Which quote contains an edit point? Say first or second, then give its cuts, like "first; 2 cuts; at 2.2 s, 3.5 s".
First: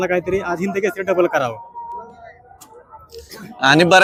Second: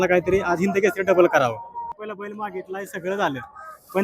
second; 1 cut; at 1.9 s